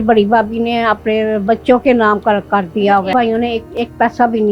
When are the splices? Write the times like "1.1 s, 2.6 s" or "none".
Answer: 3.1 s